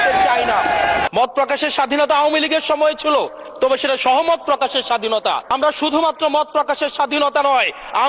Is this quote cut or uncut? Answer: cut